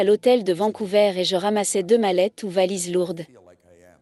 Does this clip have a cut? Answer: no; 0 cuts

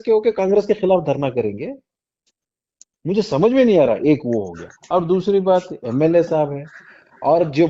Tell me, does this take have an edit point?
no; 0 cuts

